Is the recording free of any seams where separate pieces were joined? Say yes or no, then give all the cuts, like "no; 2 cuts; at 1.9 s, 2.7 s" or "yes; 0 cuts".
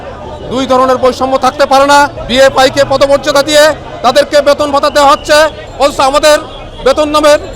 no; 1 cut; at 2.2 s